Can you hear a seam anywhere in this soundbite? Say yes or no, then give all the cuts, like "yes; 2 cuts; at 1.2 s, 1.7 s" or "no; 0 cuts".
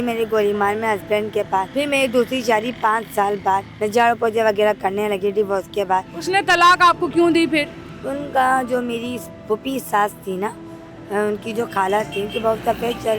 yes; 3 cuts; at 1.7 s, 3.7 s, 6.1 s